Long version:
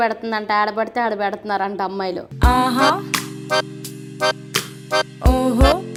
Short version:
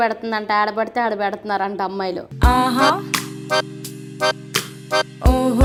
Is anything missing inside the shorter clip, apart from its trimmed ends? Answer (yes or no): no